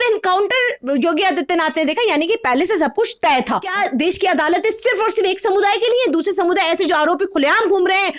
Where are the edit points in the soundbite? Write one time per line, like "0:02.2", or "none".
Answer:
0:03.7